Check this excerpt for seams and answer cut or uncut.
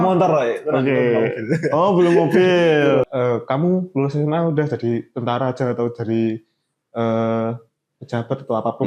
cut